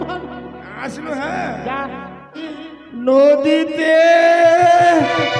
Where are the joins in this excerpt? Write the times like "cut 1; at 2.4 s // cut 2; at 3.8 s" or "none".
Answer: cut 1; at 2.4 s

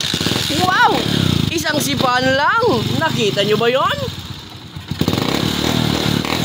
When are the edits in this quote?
none

